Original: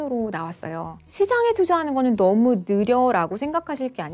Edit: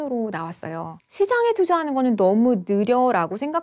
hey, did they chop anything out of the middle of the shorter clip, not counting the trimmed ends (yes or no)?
no